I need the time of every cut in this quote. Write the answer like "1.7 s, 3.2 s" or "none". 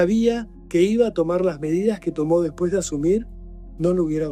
none